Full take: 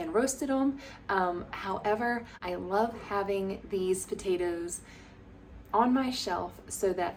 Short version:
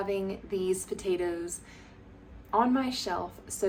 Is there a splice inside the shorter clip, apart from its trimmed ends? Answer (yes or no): no